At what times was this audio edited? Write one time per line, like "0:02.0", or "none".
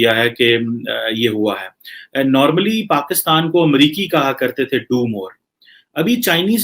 none